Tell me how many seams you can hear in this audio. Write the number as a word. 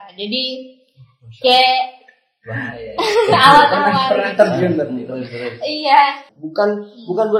one